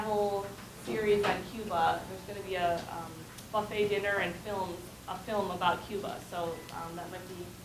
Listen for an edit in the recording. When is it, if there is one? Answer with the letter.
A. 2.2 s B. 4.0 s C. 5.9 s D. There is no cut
B